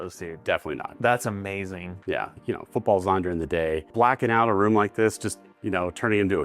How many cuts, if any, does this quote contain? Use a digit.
2